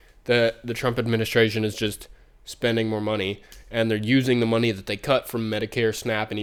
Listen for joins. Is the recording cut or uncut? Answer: uncut